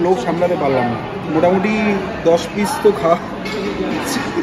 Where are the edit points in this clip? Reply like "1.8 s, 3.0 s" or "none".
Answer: 1.2 s